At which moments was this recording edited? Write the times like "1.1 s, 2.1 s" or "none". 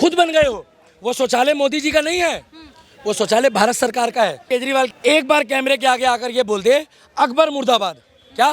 4.6 s